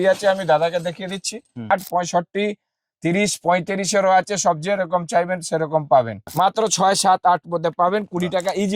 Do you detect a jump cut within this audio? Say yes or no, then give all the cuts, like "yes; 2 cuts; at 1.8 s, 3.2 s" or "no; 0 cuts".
yes; 2 cuts; at 1.7 s, 6.3 s